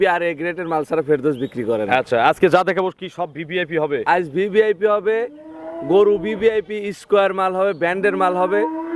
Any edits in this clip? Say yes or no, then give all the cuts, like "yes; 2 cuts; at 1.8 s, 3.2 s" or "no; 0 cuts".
no; 0 cuts